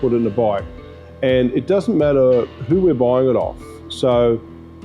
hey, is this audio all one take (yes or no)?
yes